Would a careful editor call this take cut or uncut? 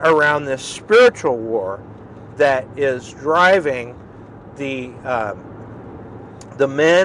uncut